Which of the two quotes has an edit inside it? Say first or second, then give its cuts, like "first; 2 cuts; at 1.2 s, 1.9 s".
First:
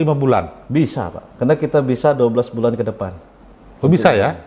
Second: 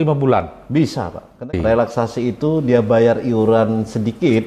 second; 1 cut; at 1.4 s